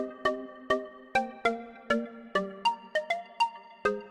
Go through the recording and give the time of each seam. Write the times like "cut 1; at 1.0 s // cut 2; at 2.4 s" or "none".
none